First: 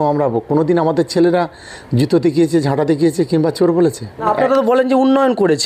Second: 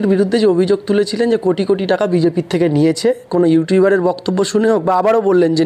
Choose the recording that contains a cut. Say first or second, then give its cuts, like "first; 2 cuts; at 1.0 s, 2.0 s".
first; 1 cut; at 4.2 s